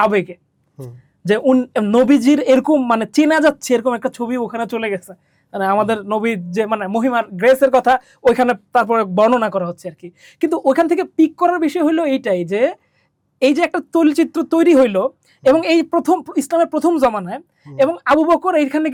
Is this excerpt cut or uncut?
uncut